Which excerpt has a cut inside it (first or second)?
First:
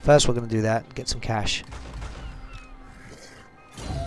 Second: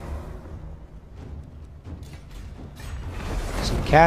first